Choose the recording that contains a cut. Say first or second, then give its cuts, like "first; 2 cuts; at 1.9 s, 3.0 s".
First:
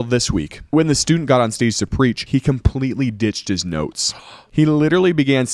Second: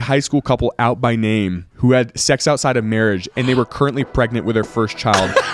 first; 3 cuts; at 0.7 s, 2.2 s, 4.5 s